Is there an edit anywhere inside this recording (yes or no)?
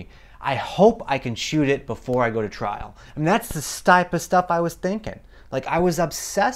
no